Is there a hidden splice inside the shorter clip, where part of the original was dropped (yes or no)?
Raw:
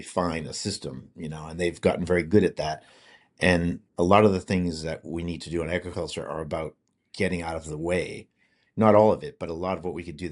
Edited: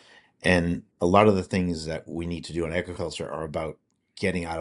no